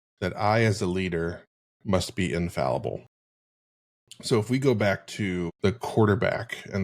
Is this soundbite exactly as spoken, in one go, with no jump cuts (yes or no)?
no